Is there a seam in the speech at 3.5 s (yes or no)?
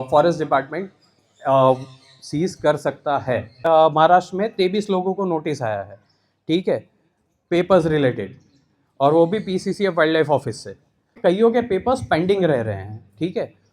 yes